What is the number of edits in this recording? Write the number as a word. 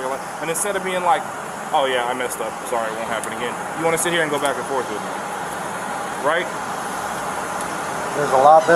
zero